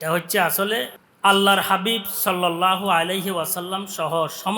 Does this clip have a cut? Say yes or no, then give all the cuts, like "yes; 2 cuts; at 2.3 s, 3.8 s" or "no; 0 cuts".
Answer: yes; 1 cut; at 1.0 s